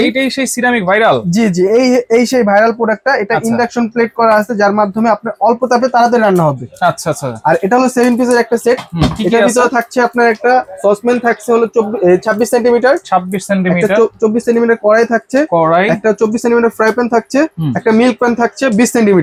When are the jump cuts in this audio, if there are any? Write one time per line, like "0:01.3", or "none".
none